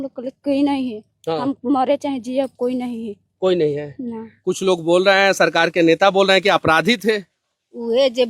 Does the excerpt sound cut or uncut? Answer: cut